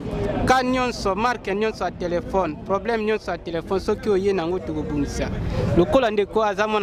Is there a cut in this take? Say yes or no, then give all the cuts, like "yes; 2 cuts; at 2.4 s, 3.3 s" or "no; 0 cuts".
no; 0 cuts